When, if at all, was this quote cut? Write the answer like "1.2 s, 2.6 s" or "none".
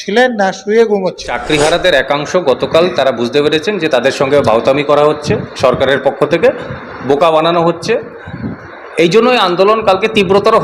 1.3 s